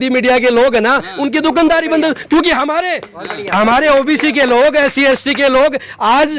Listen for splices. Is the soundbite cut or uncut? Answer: uncut